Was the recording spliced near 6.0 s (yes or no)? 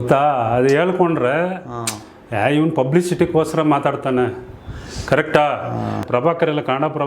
yes